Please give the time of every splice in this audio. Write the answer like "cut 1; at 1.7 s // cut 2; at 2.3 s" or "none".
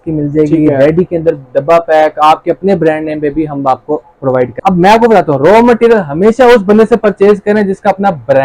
cut 1; at 4.5 s